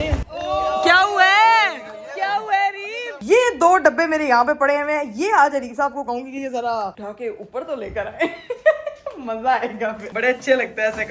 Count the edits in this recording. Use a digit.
2